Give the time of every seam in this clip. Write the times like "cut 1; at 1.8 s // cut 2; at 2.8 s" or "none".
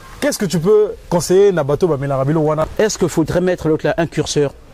cut 1; at 2.7 s